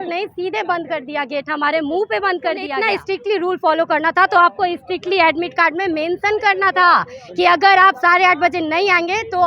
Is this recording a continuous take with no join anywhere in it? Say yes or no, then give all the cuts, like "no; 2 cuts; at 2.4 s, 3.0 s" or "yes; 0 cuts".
no; 1 cut; at 2.7 s